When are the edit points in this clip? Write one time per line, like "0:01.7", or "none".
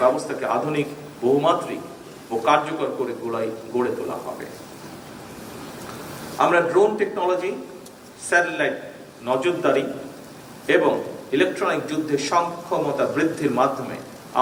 none